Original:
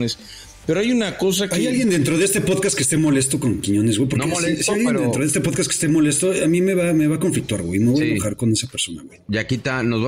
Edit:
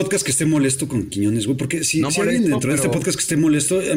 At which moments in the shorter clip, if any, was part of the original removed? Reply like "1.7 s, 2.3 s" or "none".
none

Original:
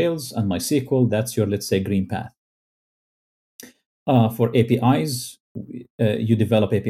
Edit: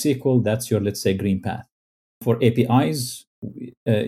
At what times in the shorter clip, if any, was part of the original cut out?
2.2 s

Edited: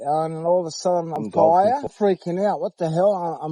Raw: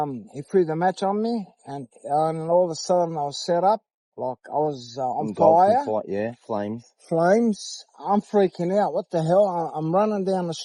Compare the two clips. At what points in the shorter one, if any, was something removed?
1.1 s, 1.9 s

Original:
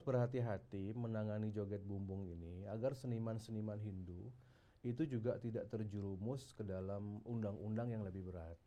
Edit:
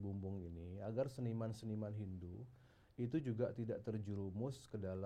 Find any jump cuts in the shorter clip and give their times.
none

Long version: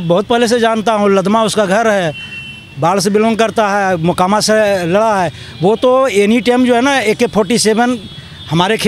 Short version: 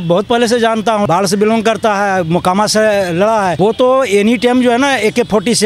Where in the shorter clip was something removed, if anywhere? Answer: 1.1 s, 3.5 s

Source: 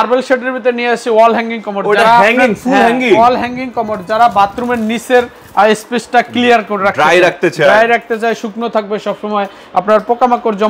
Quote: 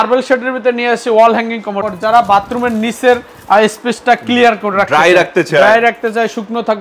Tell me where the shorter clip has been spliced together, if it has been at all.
1.7 s

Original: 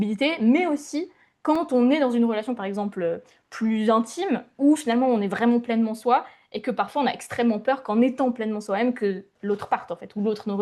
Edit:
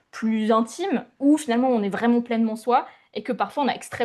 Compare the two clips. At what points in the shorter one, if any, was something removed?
none

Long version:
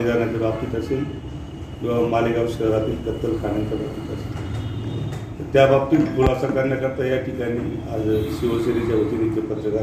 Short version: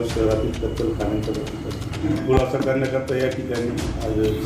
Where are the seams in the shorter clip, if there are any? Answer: 2.1 s

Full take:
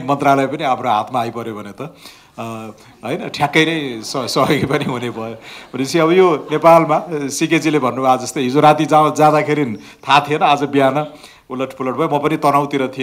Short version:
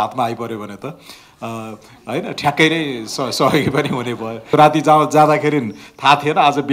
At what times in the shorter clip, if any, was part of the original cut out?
4.5 s

